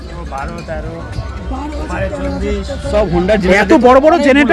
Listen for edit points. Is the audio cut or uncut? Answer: uncut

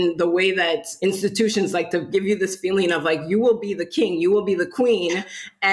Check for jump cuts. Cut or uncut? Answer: cut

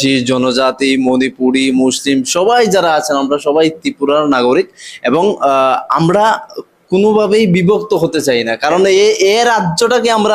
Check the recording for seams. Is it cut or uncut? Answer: uncut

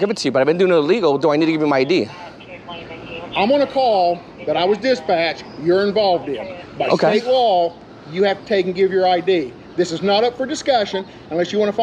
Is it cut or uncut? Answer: uncut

